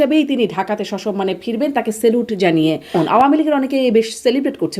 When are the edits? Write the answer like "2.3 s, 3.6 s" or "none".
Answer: 3.0 s